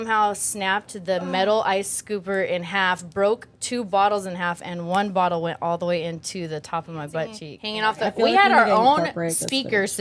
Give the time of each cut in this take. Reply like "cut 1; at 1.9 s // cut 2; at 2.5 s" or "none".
cut 1; at 7.5 s